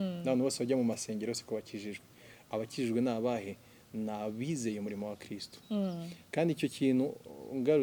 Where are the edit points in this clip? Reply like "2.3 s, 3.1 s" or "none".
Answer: none